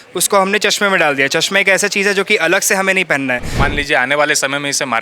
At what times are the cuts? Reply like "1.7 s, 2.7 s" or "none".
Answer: 3.5 s